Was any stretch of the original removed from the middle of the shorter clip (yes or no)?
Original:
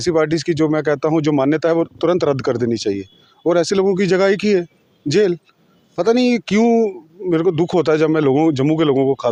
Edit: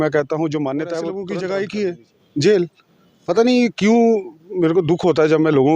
yes